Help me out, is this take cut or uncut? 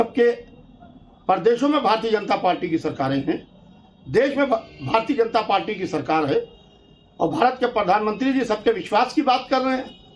uncut